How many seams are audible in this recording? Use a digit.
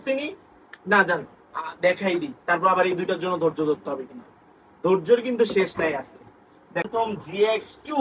1